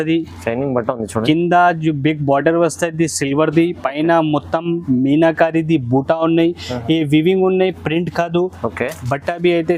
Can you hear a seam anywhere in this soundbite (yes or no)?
no